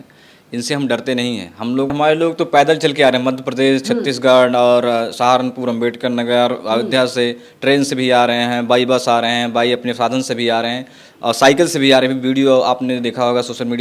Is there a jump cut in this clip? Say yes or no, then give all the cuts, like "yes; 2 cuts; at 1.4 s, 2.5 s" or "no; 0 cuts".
yes; 1 cut; at 1.9 s